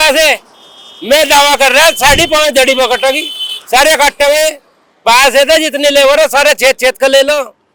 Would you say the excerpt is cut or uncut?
uncut